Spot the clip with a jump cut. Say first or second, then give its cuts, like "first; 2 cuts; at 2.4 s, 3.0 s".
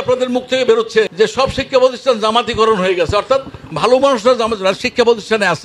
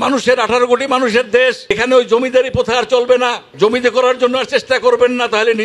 second; 1 cut; at 1.7 s